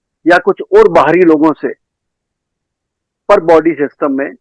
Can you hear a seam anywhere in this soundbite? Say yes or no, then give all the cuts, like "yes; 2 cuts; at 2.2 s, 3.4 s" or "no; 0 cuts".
no; 0 cuts